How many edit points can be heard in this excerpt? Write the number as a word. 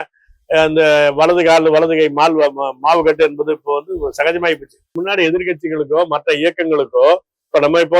one